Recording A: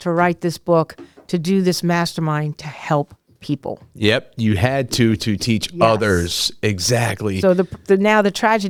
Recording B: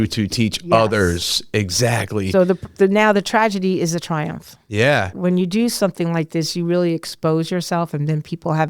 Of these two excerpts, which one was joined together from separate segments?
B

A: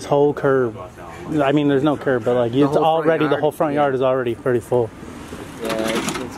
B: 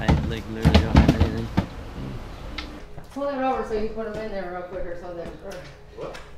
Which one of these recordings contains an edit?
B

